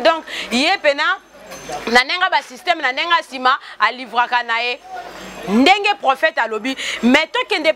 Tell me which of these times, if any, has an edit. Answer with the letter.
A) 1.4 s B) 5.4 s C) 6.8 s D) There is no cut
D